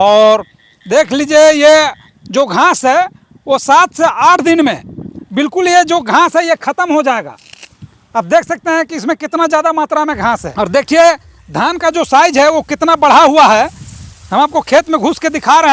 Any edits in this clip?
yes; 1 cut; at 10.5 s

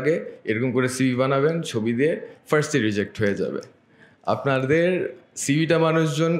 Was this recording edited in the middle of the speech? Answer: no; 0 cuts

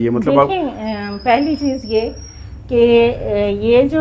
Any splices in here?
no; 0 cuts

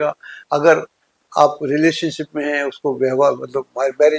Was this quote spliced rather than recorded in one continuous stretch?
no; 0 cuts

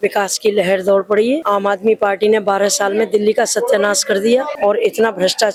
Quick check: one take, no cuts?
yes; 0 cuts

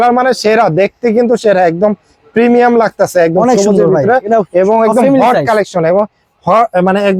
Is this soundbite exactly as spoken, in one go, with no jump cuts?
yes; 0 cuts

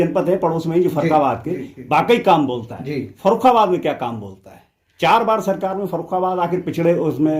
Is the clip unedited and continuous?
yes; 0 cuts

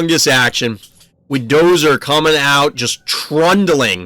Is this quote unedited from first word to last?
yes; 0 cuts

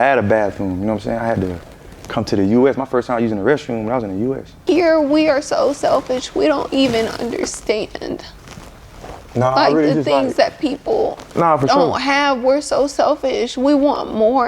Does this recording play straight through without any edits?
no; 1 cut; at 4.5 s

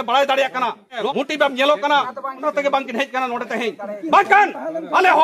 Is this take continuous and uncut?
yes; 0 cuts

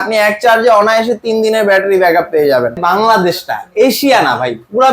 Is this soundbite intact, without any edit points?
no; 1 cut; at 2.8 s

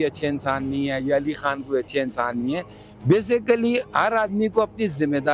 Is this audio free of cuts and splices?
yes; 0 cuts

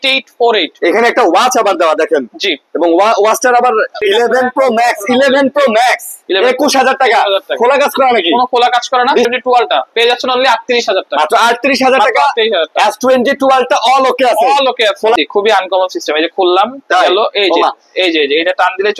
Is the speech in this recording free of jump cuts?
no; 3 cuts; at 4.0 s, 9.3 s, 15.2 s

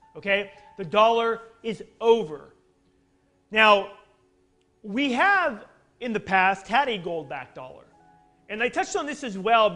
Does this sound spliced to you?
no; 0 cuts

